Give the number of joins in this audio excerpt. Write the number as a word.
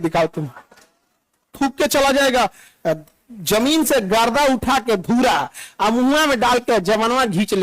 one